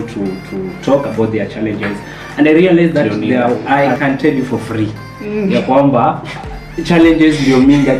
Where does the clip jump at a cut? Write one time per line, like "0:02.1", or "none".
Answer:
0:03.6